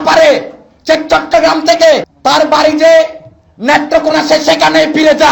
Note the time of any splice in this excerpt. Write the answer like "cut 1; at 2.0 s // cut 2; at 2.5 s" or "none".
none